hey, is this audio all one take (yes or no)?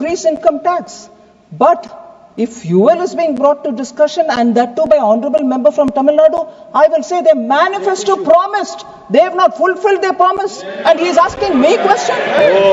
yes